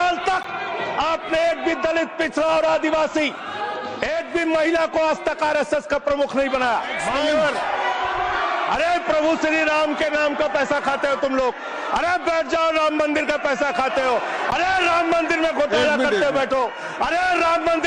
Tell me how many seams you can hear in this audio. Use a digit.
1